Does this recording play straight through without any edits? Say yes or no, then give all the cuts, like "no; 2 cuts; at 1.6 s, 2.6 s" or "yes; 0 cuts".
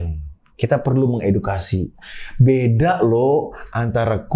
yes; 0 cuts